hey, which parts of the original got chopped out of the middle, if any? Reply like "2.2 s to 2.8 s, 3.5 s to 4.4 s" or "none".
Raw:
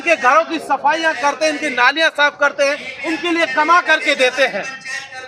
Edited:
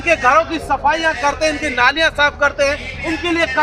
none